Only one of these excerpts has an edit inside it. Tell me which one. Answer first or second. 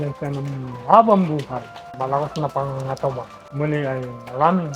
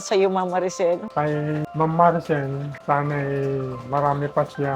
second